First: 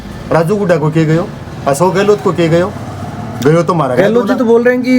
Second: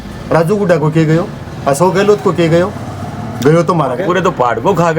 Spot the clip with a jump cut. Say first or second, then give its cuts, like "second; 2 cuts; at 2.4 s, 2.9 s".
second; 1 cut; at 4.0 s